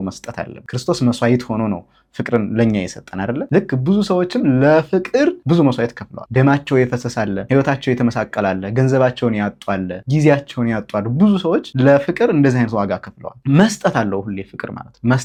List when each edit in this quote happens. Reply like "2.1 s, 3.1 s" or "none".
none